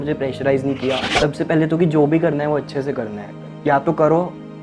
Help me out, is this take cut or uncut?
cut